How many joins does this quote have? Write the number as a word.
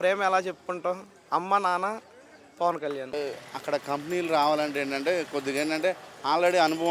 one